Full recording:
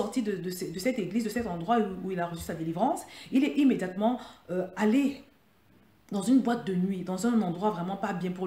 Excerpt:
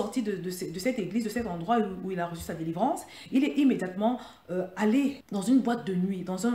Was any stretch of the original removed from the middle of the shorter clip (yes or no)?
yes